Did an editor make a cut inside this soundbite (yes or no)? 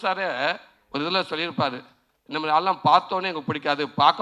no